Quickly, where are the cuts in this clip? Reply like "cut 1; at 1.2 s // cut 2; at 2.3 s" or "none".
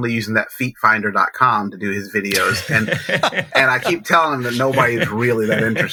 none